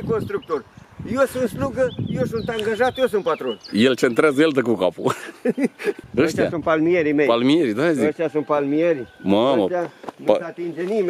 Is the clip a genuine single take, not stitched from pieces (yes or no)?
no